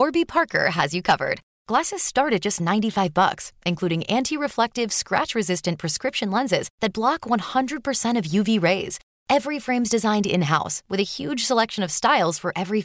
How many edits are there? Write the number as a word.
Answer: zero